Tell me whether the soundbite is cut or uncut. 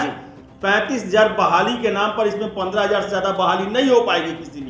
uncut